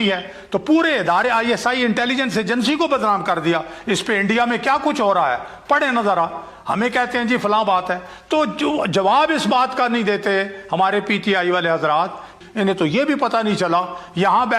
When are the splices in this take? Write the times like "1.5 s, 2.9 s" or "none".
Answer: 12.4 s

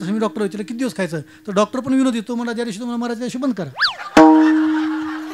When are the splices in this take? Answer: none

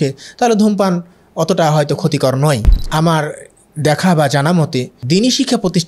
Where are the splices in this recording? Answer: 2.8 s, 5.0 s

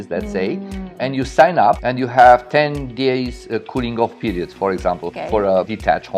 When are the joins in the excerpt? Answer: 1.9 s, 5.3 s

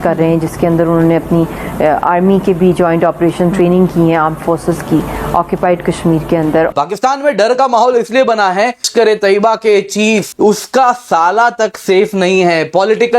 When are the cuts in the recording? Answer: 6.7 s, 8.9 s, 10.3 s

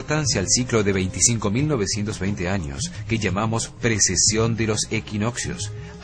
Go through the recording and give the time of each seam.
4.7 s

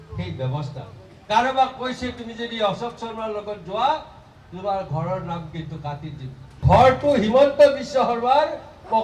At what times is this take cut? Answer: 1.1 s, 6.6 s

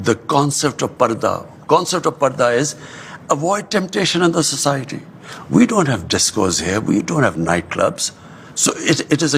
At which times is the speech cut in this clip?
none

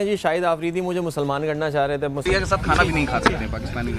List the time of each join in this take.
2.2 s

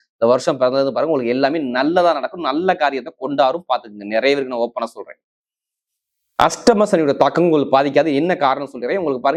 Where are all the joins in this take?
none

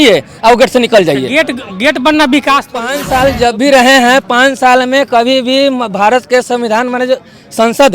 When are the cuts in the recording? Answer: 3.0 s

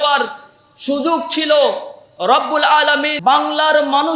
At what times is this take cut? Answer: 3.1 s

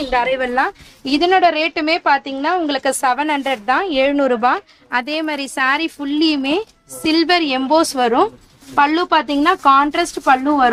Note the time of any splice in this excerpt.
none

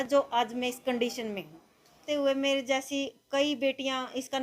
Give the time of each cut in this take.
2.0 s

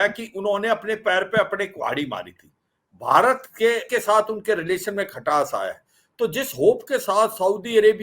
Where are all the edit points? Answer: 3.8 s

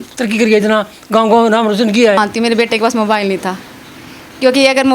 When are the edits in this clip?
2.2 s

